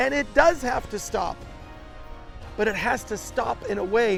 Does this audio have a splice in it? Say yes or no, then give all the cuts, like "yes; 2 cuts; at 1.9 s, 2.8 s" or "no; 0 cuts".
no; 0 cuts